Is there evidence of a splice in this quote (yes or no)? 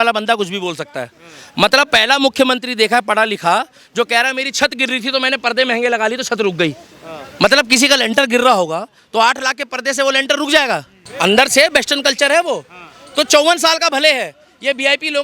yes